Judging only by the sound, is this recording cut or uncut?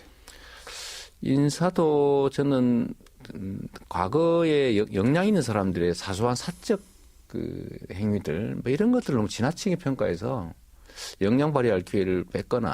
cut